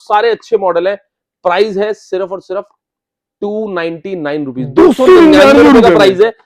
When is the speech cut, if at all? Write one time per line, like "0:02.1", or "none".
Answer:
none

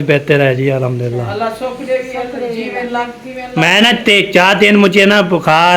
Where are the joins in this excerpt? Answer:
none

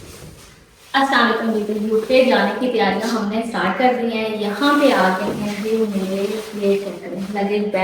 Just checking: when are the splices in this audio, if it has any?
none

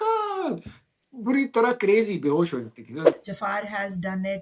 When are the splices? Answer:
0:03.1

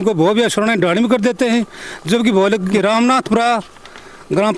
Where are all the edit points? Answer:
0:02.6

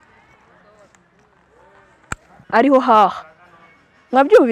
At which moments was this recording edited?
0:02.4

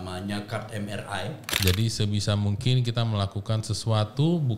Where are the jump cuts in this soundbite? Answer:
0:01.5

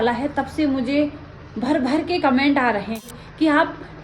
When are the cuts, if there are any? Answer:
0:03.1

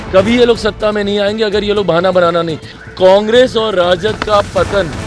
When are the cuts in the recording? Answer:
0:02.6

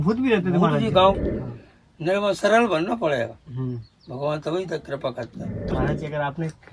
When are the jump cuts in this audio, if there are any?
0:01.2
0:05.5

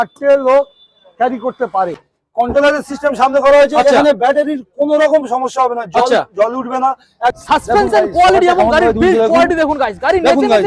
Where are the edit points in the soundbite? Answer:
0:02.0
0:07.4

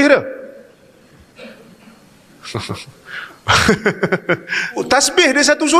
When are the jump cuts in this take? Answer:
0:04.8

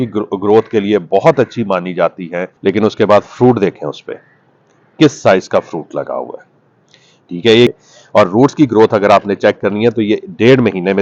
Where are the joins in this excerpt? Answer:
0:02.4
0:07.7

